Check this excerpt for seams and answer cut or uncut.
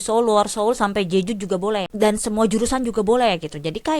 cut